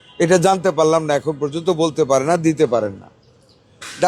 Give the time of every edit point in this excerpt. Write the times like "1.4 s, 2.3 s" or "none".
none